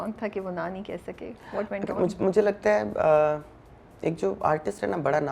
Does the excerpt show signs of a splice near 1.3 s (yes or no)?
no